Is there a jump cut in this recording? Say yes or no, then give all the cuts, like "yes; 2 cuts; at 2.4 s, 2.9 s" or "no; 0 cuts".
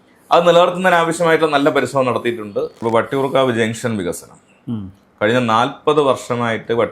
yes; 1 cut; at 2.8 s